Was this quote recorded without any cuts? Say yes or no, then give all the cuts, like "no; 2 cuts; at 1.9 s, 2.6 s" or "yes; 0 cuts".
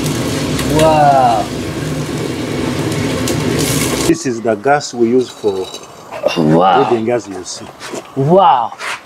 no; 1 cut; at 4.1 s